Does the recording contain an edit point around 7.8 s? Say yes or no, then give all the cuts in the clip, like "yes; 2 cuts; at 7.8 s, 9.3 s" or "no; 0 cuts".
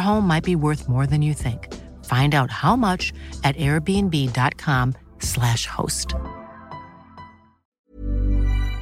yes; 1 cut; at 7.8 s